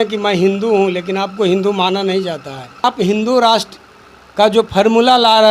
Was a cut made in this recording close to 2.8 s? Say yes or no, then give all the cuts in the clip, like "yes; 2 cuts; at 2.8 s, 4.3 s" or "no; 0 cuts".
yes; 1 cut; at 2.8 s